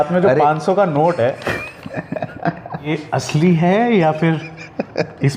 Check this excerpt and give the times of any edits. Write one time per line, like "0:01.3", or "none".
0:02.8